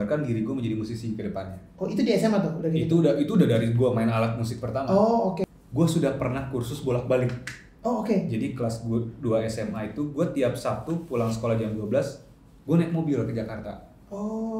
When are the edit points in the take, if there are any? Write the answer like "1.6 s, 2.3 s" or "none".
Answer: 5.4 s